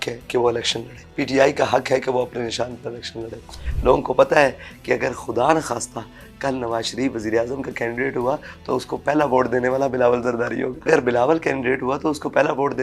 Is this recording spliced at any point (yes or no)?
yes